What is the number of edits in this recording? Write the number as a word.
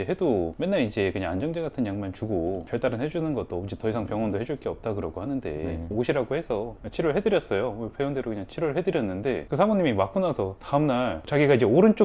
one